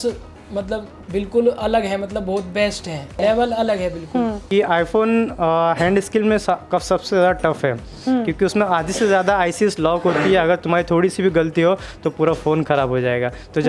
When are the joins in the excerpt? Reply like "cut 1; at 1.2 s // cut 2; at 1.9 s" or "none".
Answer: cut 1; at 1.0 s // cut 2; at 3.2 s // cut 3; at 4.5 s

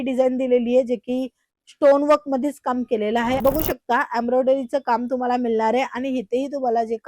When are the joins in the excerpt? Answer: cut 1; at 3.4 s

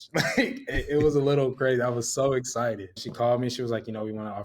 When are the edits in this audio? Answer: cut 1; at 3.1 s

